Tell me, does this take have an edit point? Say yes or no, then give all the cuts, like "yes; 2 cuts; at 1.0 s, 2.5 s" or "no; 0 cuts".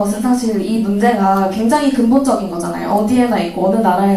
no; 0 cuts